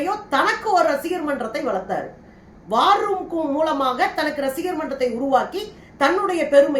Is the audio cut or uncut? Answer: uncut